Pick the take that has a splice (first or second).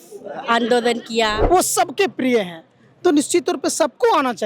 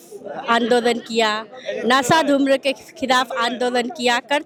first